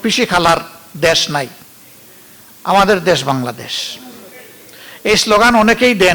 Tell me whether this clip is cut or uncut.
uncut